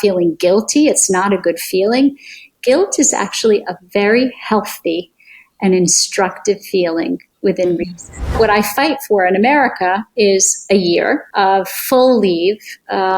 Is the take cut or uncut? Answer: cut